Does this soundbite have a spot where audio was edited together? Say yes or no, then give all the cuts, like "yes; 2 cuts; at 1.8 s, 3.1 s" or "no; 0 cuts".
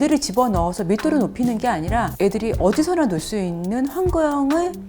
yes; 1 cut; at 2.1 s